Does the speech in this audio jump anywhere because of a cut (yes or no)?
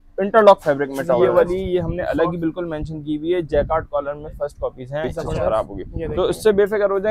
yes